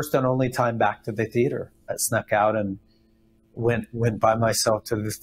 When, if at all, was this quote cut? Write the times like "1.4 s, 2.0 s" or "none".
1.8 s